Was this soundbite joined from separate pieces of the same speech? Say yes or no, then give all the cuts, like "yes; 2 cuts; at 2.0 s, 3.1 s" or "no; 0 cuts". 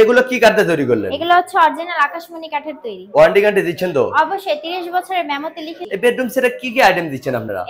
yes; 1 cut; at 5.7 s